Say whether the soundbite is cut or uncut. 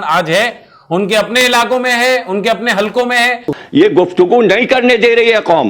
cut